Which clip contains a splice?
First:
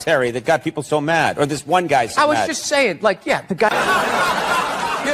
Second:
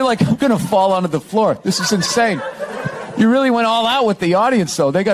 first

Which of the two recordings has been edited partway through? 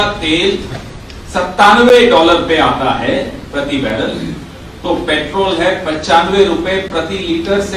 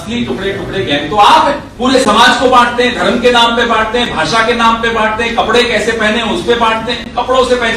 second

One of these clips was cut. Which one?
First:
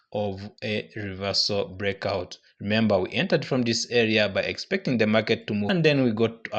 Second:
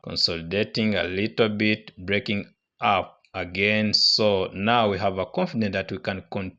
first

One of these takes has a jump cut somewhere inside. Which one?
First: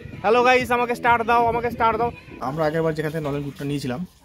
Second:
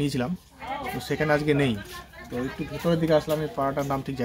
first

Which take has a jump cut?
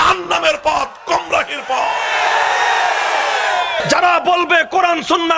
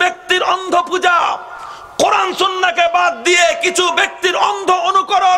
first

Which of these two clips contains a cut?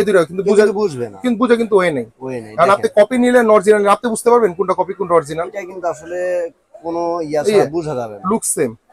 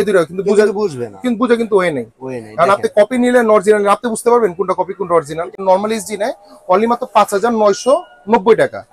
second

